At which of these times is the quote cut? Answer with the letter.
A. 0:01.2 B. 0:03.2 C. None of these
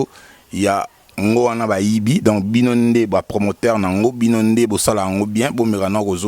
C